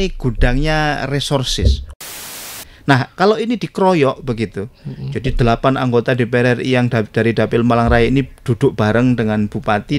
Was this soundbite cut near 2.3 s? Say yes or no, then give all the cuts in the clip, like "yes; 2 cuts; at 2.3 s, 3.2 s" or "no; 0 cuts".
yes; 1 cut; at 2.3 s